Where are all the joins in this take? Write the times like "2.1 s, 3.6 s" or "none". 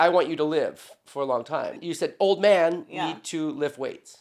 1.8 s